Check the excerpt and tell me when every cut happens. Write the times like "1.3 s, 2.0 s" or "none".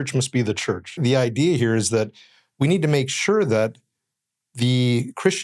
1.0 s